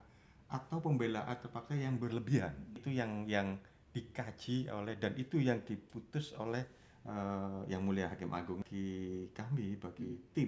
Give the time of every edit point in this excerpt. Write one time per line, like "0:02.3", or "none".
0:02.8
0:08.7